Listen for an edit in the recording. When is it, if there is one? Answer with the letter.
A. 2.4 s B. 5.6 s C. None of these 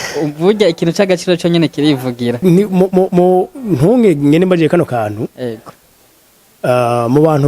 A